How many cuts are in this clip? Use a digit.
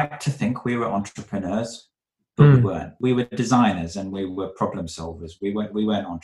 1